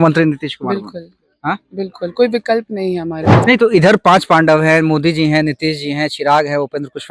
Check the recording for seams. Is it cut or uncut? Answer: cut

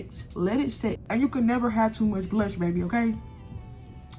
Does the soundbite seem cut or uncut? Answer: cut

